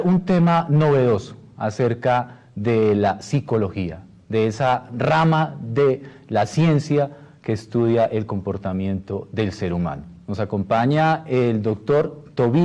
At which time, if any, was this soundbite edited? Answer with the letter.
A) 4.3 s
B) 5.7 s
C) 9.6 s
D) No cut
C